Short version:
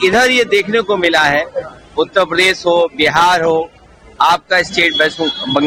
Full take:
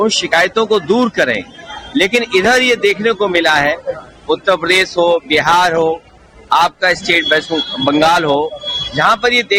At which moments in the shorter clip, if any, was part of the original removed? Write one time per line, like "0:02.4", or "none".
none